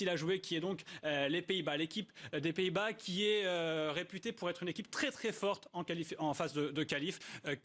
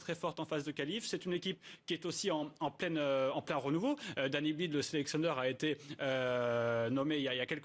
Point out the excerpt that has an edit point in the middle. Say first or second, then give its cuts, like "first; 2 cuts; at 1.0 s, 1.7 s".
first; 1 cut; at 6.0 s